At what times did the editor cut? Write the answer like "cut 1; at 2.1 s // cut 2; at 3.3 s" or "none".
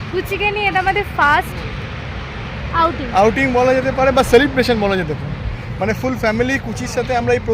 none